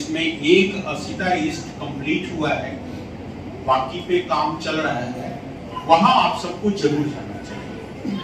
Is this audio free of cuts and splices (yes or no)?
yes